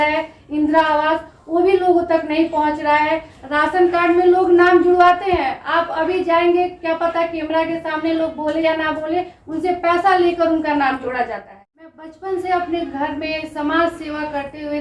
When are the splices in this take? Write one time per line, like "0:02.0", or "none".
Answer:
0:12.0